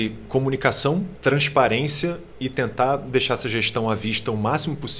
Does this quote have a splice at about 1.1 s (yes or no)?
yes